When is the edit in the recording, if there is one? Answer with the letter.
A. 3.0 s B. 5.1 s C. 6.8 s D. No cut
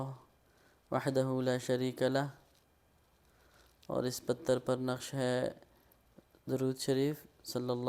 D